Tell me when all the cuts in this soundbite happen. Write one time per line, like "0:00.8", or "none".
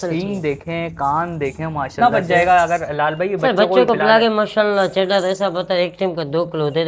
0:01.9